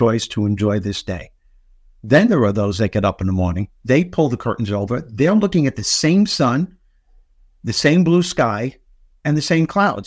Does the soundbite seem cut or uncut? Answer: cut